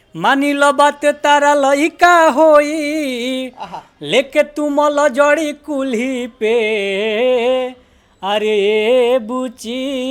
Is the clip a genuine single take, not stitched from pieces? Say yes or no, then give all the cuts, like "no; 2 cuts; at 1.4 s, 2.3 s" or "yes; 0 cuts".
yes; 0 cuts